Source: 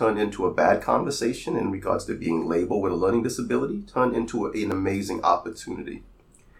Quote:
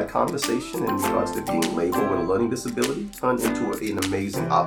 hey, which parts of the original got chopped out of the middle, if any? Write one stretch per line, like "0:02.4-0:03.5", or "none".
none